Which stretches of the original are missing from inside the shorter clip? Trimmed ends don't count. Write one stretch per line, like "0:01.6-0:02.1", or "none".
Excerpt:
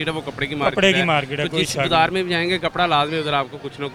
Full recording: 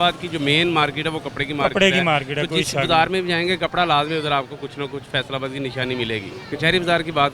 none